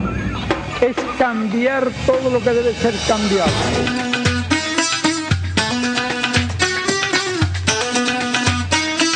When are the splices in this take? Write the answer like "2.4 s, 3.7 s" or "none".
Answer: none